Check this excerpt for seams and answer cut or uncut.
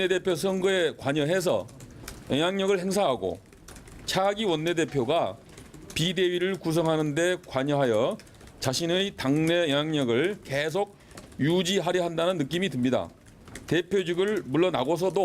cut